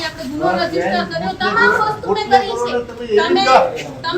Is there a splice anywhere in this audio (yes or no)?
no